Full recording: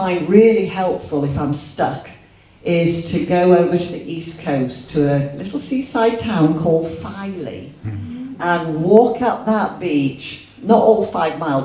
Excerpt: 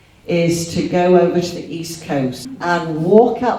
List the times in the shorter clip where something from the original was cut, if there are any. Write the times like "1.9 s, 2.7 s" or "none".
2.4 s